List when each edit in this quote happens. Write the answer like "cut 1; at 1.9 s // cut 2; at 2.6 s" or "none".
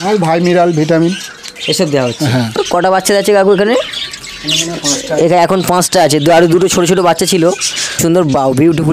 cut 1; at 2.6 s // cut 2; at 8.0 s